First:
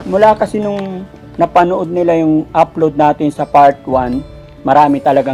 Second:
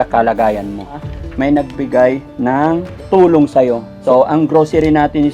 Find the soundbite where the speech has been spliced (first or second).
second